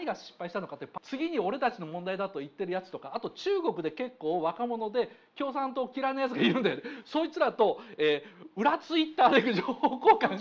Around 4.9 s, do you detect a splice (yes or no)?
no